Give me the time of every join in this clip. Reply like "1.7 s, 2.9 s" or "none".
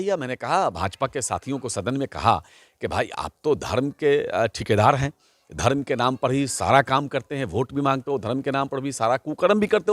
none

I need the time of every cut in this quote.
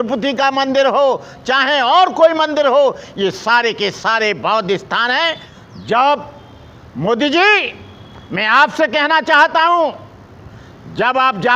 5.5 s

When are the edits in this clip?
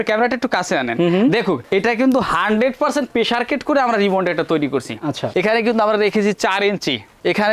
5.3 s

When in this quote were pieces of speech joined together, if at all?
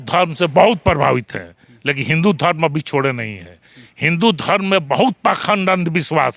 none

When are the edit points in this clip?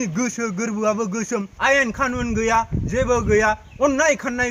1.5 s

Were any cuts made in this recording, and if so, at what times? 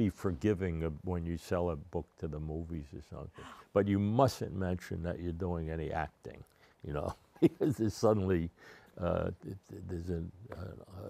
none

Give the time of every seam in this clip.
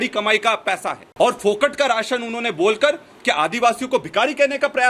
1.0 s

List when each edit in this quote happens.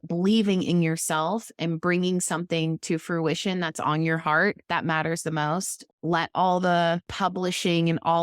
5.8 s, 7.1 s

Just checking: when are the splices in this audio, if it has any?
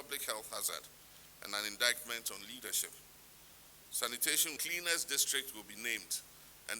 4.6 s

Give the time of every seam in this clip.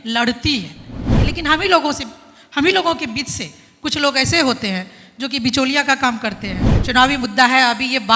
1.1 s, 6.7 s

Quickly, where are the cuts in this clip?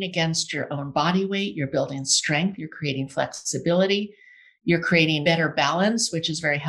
5.2 s

